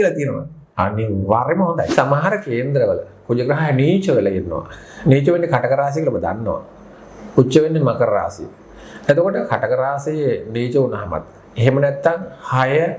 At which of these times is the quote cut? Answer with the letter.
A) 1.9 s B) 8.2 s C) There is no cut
A